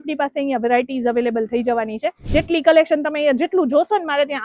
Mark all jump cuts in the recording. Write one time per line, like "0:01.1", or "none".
0:02.2